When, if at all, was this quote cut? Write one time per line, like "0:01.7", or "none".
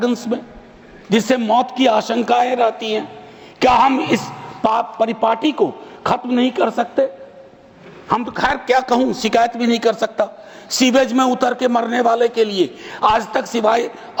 none